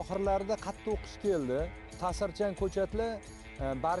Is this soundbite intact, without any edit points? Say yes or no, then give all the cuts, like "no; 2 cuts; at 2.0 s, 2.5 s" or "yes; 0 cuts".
yes; 0 cuts